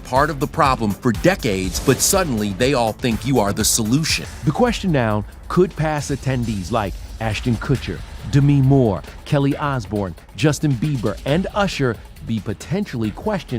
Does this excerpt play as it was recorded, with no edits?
no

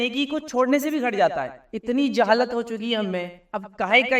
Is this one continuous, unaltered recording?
no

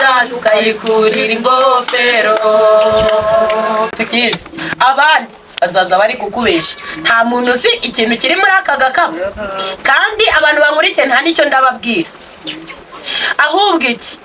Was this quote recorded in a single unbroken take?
no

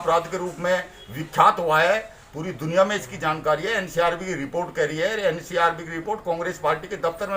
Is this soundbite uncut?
yes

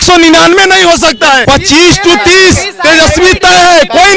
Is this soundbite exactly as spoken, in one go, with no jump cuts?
no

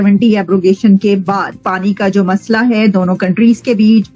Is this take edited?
yes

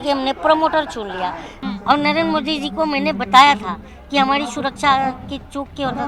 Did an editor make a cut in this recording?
yes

